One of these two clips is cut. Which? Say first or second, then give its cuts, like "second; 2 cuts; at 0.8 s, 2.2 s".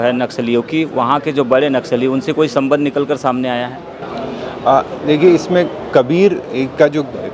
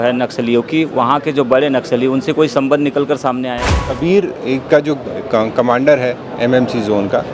second; 1 cut; at 4.0 s